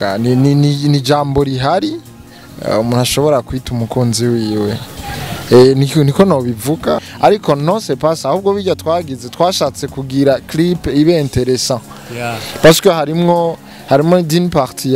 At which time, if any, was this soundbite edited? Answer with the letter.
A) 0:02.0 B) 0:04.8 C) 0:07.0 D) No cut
C